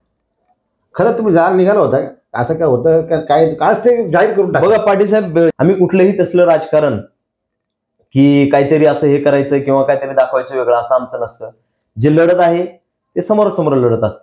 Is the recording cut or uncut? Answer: cut